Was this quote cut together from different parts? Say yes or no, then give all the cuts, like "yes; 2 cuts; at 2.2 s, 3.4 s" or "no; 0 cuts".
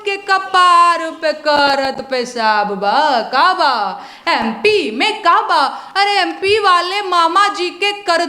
no; 0 cuts